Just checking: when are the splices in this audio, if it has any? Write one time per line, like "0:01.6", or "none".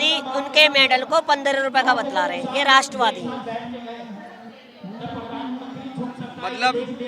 none